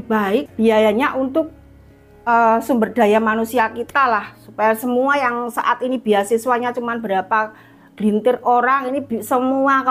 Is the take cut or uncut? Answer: uncut